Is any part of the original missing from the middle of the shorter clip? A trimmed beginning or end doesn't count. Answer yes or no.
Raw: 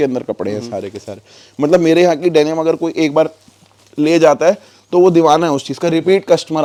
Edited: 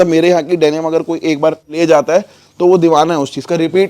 yes